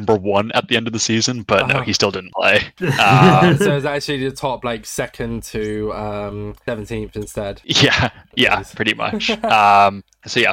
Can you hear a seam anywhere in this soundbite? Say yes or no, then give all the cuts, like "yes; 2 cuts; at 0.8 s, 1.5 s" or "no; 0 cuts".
no; 0 cuts